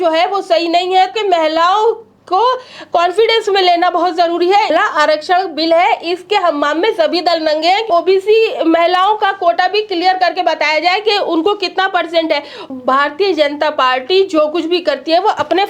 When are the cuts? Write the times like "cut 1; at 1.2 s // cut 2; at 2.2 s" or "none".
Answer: cut 1; at 1.1 s // cut 2; at 4.7 s // cut 3; at 7.9 s // cut 4; at 12.6 s